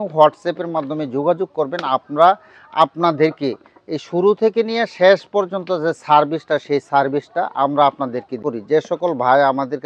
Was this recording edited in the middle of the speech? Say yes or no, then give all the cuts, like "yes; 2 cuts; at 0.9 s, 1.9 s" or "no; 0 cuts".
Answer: yes; 1 cut; at 8.5 s